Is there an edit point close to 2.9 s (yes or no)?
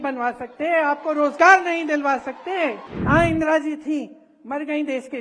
yes